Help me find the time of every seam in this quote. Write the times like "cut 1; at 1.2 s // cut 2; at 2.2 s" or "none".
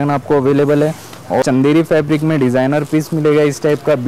cut 1; at 1.4 s